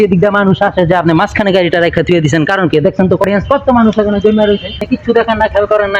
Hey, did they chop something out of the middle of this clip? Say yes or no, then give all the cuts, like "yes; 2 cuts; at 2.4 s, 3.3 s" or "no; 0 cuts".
yes; 2 cuts; at 3.3 s, 4.8 s